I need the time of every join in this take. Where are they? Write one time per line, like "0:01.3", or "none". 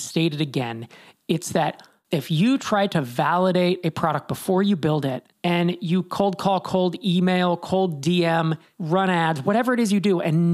0:01.9